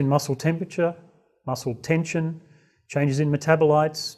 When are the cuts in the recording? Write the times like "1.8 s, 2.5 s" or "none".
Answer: none